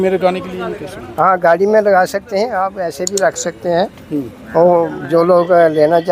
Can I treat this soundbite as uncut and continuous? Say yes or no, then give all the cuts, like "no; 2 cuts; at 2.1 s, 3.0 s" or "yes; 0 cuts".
yes; 0 cuts